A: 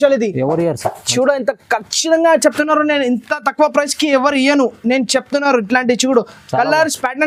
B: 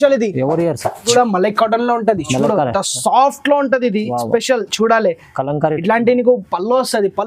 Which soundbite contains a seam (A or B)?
B